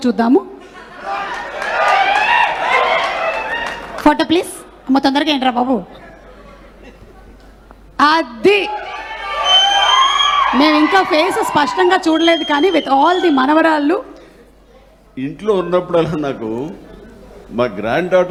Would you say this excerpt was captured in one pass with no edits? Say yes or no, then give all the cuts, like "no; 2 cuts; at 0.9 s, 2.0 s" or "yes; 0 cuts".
yes; 0 cuts